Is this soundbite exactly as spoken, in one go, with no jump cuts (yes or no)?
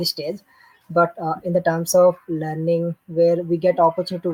yes